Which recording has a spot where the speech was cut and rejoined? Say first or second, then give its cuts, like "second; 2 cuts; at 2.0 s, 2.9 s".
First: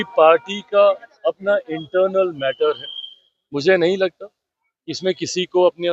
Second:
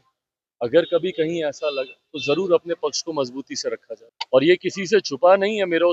second; 1 cut; at 3.9 s